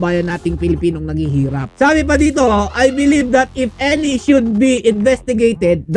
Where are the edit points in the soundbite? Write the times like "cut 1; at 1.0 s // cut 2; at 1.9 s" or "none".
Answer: cut 1; at 1.6 s